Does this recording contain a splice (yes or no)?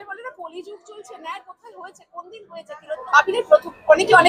yes